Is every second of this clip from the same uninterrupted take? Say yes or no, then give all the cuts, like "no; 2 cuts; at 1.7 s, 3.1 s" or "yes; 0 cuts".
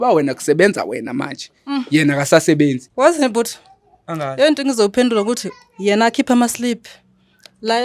no; 1 cut; at 2.8 s